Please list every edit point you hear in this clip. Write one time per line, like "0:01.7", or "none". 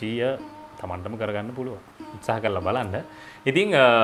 none